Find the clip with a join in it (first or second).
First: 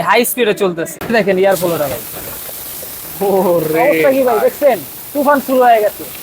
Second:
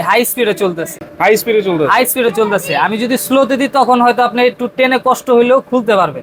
first